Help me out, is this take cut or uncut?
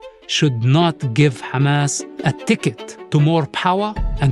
cut